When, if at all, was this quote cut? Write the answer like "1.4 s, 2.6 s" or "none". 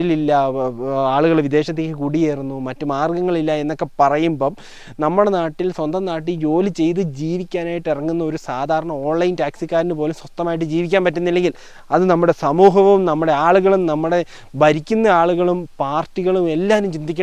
none